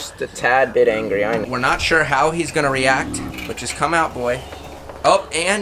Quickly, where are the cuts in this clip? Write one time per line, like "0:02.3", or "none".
0:01.4
0:03.3